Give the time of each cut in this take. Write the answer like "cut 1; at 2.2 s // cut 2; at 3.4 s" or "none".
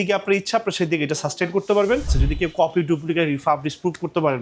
cut 1; at 2.2 s

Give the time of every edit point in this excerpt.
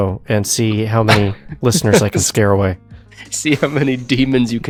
none

